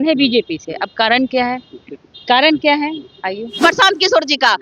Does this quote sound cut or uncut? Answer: cut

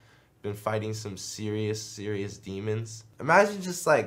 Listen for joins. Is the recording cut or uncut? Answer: cut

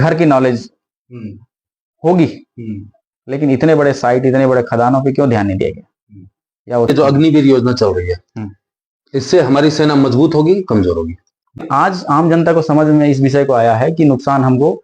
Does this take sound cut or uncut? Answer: cut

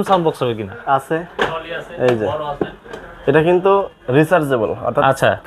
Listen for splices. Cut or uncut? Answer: uncut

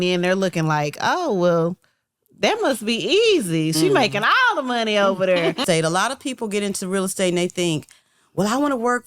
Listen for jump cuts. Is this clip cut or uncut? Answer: cut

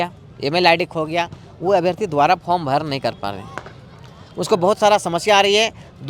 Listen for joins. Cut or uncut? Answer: uncut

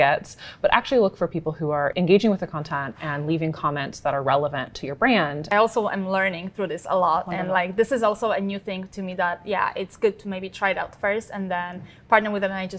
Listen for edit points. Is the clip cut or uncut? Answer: cut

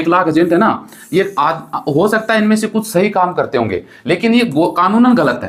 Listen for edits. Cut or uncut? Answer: uncut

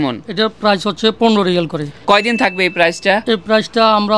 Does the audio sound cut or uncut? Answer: cut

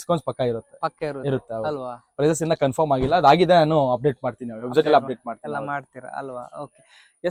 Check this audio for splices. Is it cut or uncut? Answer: uncut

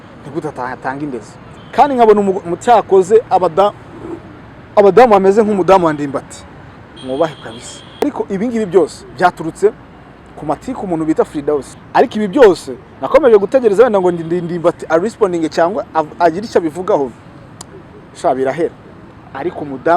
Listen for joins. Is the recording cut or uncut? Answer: cut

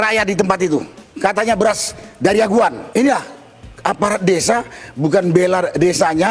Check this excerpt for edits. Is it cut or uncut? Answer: cut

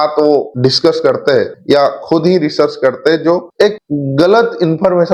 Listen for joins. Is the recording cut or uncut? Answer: uncut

